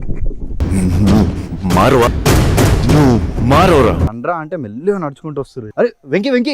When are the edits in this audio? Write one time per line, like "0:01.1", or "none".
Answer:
0:05.6

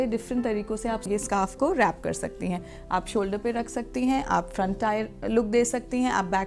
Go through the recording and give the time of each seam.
0:01.0

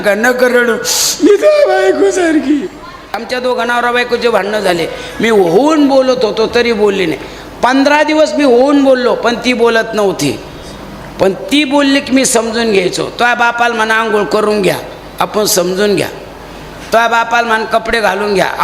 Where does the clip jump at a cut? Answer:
0:03.2

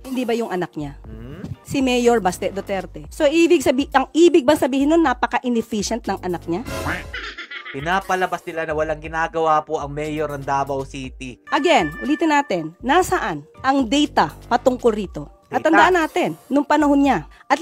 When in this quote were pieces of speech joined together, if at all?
none

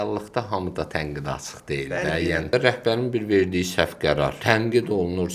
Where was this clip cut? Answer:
0:02.5
0:04.4

